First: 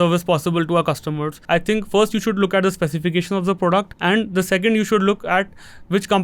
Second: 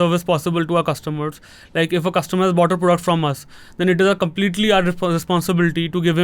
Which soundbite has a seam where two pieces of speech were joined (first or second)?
first